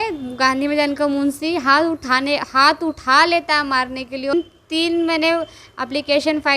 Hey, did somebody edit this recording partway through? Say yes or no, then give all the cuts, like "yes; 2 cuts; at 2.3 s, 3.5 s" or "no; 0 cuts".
yes; 1 cut; at 4.3 s